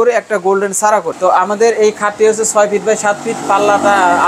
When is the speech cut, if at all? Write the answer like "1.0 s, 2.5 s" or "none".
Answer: 1.1 s